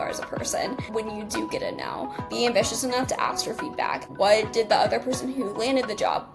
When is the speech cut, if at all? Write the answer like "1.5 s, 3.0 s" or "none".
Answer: 0.9 s, 2.3 s, 4.1 s